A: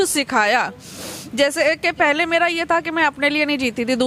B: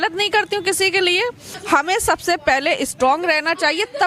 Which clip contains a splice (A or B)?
B